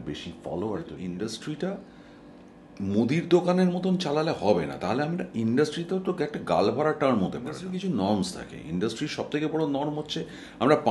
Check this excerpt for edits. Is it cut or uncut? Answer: cut